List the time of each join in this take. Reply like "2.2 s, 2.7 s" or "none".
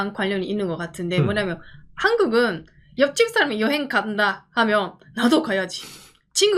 none